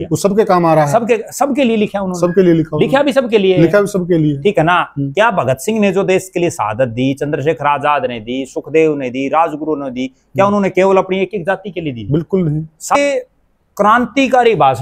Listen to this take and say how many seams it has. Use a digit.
1